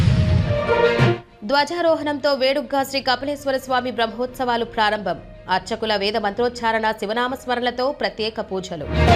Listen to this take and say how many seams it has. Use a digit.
0